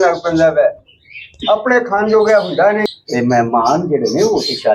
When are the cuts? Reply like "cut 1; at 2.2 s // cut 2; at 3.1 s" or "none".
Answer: cut 1; at 2.9 s